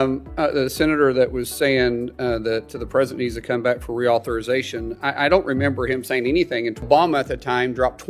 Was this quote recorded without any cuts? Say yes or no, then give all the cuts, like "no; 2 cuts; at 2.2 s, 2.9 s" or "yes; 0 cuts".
no; 1 cut; at 6.8 s